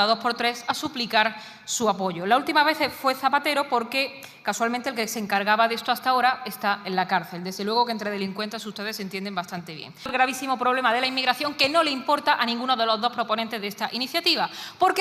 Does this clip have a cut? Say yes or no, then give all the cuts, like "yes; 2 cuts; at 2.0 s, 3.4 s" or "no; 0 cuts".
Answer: yes; 1 cut; at 10.1 s